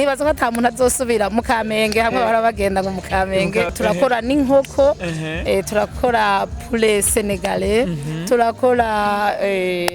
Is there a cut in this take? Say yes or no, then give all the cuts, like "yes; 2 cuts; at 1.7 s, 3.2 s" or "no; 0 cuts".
yes; 1 cut; at 3.7 s